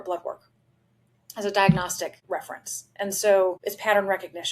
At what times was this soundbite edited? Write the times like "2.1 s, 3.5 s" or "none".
2.1 s, 3.6 s